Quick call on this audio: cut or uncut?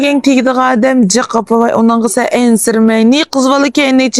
uncut